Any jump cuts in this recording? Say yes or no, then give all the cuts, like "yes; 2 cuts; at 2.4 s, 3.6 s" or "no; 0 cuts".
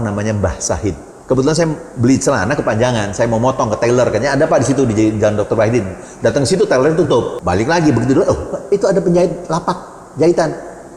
yes; 2 cuts; at 1.1 s, 7.4 s